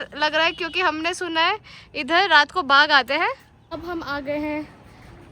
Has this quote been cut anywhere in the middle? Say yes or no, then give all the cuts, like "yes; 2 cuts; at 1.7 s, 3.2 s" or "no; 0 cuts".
yes; 1 cut; at 3.8 s